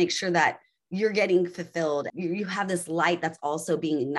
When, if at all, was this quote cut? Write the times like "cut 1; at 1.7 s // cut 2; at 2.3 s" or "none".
cut 1; at 2.1 s

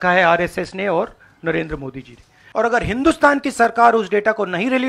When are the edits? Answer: cut 1; at 2.3 s

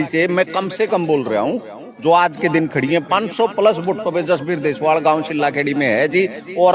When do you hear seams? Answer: none

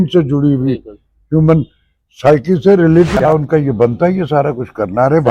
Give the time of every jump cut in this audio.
cut 1; at 3.3 s

